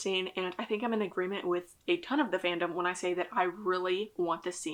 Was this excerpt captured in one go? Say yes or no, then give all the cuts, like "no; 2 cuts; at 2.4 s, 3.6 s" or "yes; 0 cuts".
yes; 0 cuts